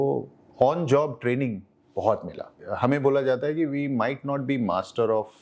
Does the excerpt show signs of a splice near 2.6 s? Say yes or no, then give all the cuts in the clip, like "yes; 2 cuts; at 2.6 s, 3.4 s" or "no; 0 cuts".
yes; 1 cut; at 2.6 s